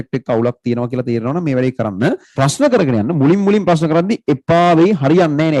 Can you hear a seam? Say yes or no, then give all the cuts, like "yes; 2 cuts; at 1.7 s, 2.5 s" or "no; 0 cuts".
yes; 1 cut; at 2.3 s